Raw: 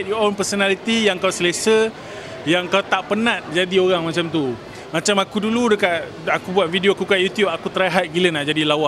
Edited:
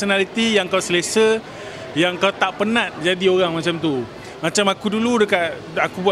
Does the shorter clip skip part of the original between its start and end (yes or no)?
no